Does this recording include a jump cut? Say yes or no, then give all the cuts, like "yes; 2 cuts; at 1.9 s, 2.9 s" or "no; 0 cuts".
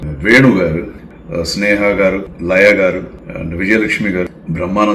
yes; 1 cut; at 1.0 s